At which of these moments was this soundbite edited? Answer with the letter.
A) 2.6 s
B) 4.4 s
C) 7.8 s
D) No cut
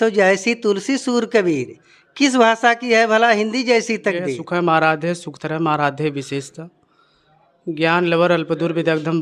B